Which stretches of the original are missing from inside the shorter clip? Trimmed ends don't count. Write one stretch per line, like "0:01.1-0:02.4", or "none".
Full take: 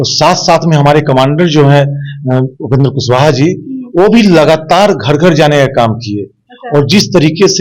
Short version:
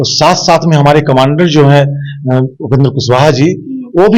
none